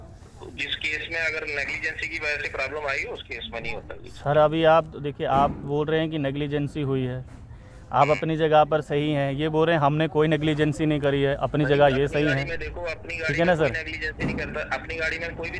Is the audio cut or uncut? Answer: uncut